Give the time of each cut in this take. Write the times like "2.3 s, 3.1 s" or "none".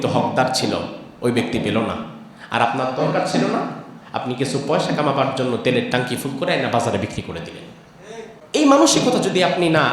8.4 s

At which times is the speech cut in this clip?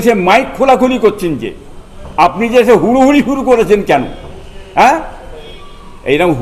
none

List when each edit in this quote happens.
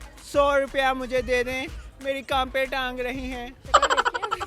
3.5 s

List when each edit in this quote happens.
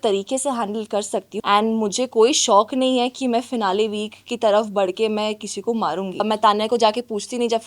1.3 s, 6.2 s

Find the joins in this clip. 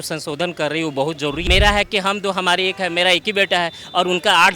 1.4 s

